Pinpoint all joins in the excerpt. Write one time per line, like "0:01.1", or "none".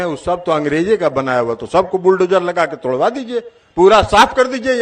none